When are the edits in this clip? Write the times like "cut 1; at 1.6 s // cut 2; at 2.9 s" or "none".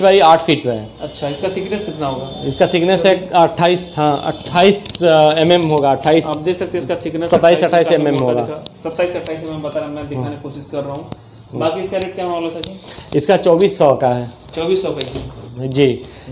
none